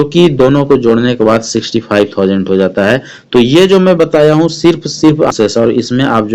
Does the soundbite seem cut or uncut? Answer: cut